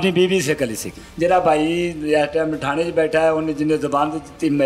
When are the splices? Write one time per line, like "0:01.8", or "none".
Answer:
0:00.9